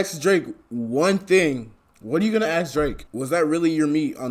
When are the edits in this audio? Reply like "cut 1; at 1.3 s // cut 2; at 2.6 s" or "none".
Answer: cut 1; at 3.0 s